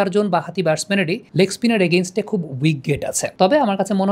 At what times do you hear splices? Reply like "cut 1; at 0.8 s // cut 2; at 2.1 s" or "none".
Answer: cut 1; at 1.2 s // cut 2; at 3.2 s

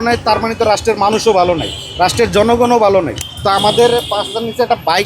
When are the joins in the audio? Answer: cut 1; at 3.2 s

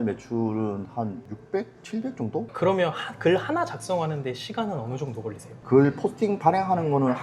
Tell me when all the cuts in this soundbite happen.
cut 1; at 1.3 s // cut 2; at 2.5 s // cut 3; at 5.6 s

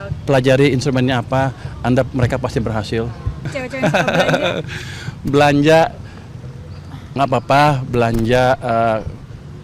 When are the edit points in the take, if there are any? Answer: cut 1; at 3.4 s

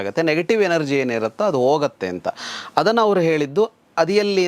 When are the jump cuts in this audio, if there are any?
none

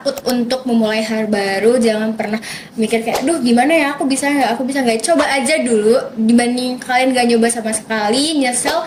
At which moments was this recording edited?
none

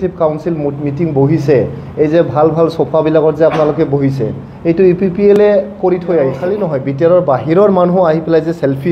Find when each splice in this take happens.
cut 1; at 6.4 s

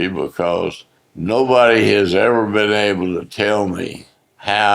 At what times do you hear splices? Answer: none

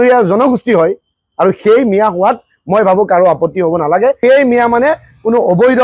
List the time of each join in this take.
cut 1; at 4.2 s

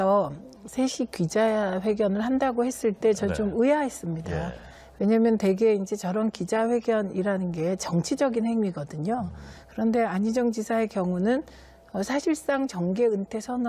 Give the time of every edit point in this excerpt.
cut 1; at 4.5 s

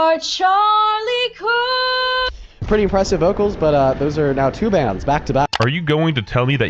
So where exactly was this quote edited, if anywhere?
none

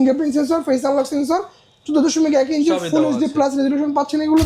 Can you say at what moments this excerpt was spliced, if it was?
none

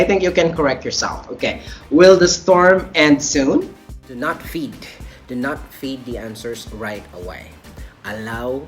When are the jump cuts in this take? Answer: cut 1; at 4.0 s

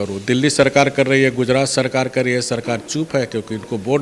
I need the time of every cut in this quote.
none

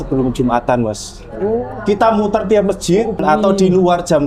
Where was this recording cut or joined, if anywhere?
cut 1; at 3.2 s

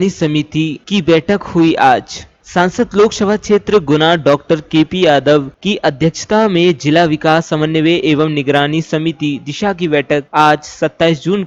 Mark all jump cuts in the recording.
none

